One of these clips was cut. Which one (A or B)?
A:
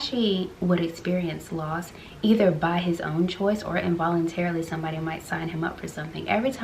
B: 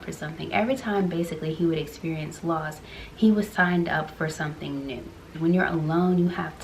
B